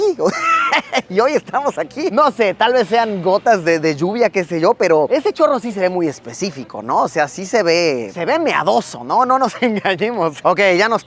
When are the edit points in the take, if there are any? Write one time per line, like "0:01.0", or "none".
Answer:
none